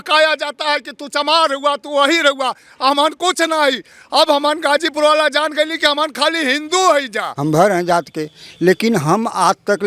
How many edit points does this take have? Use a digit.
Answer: 1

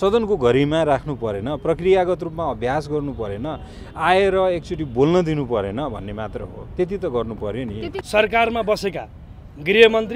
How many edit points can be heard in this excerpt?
1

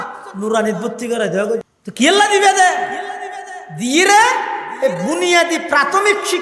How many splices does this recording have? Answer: 1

